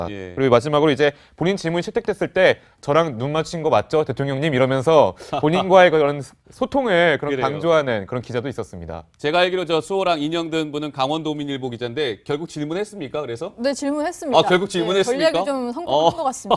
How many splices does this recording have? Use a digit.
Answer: 1